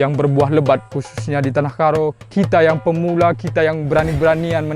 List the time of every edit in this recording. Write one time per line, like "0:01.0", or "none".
0:00.9